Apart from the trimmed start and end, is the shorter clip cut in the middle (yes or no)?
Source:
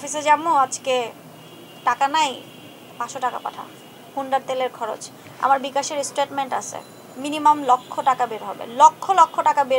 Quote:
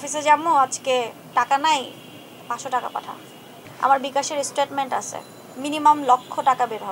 yes